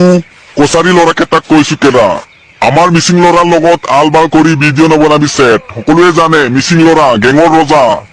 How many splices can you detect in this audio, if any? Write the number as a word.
zero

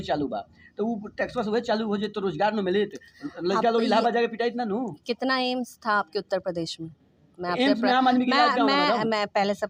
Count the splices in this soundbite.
zero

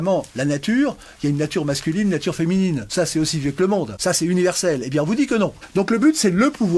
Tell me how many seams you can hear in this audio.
three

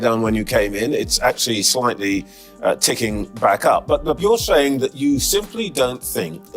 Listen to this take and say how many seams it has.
one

